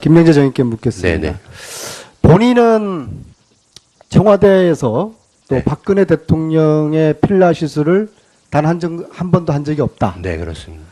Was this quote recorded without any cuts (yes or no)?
no